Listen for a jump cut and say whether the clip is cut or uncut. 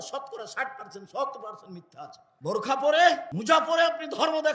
cut